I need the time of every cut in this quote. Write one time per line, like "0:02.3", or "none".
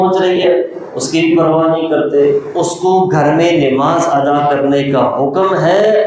0:02.5